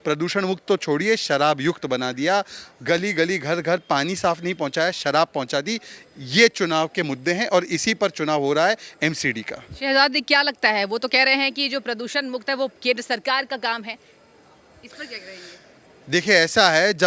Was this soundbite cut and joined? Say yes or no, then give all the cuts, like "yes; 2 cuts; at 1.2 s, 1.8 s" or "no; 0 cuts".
no; 0 cuts